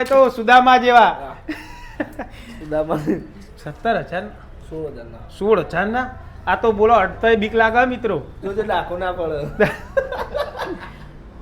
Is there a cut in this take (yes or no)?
no